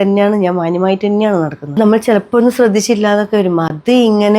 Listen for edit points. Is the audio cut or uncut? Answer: cut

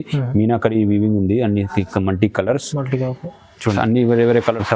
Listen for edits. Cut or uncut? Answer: cut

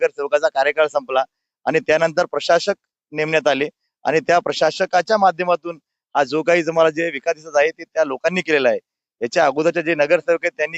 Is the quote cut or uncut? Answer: cut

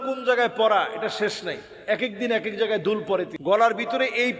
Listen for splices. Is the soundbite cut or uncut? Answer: cut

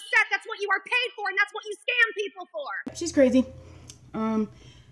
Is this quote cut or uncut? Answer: cut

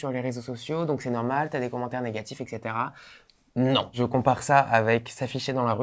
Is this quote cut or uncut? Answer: cut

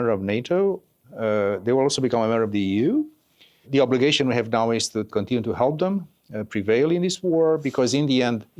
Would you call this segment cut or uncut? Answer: cut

